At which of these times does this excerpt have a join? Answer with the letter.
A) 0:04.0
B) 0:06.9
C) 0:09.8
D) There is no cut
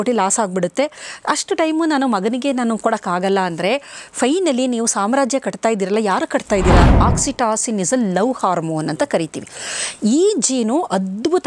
B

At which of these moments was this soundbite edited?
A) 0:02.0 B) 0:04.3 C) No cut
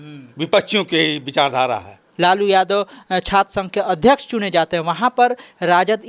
A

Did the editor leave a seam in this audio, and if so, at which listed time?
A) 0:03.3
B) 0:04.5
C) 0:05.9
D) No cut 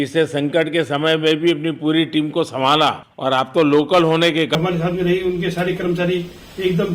B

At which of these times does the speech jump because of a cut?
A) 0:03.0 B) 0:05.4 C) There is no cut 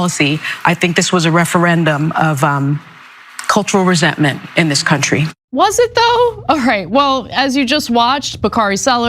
B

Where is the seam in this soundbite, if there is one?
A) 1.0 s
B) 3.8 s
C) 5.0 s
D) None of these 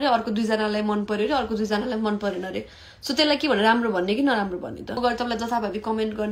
C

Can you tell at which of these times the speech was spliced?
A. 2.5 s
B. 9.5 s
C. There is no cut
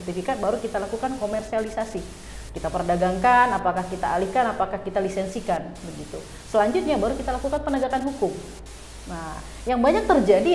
C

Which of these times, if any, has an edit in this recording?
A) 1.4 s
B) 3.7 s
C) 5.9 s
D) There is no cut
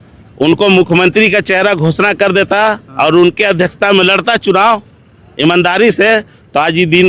D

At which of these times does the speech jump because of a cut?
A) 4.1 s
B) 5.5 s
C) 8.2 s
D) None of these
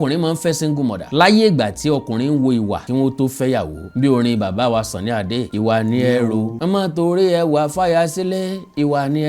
B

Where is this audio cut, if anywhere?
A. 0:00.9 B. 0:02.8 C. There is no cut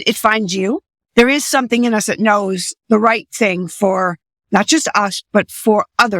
A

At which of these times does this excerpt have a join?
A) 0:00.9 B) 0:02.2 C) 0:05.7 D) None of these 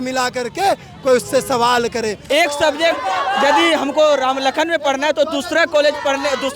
B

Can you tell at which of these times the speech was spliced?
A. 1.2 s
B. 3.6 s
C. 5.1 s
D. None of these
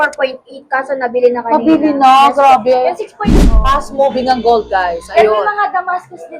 B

